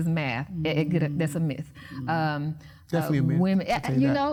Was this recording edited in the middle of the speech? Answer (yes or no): no